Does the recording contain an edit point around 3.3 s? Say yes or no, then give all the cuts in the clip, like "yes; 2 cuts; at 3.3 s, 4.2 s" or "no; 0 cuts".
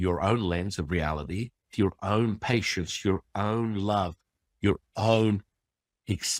no; 1 cut; at 1.7 s